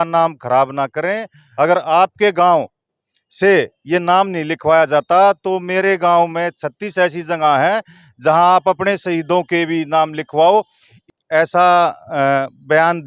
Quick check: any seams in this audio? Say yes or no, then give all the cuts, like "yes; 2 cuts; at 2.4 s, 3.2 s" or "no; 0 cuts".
yes; 2 cuts; at 1.4 s, 11.1 s